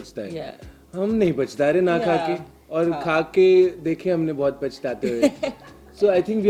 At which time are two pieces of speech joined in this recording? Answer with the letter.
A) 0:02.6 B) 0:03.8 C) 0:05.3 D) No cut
D